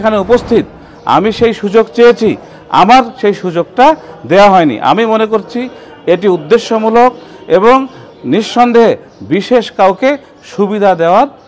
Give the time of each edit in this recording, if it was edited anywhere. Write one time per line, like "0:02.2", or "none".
none